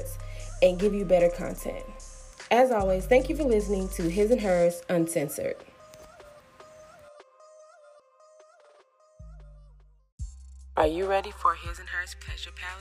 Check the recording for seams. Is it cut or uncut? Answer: cut